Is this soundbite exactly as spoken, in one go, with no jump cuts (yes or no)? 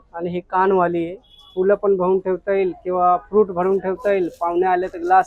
no